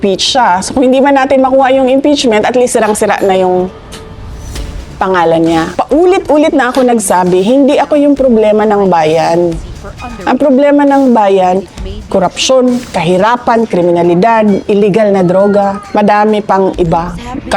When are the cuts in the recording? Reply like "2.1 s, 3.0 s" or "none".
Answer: 5.7 s, 14.6 s, 15.8 s